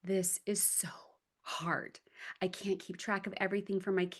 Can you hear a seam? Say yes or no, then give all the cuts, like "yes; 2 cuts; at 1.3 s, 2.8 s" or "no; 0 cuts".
no; 0 cuts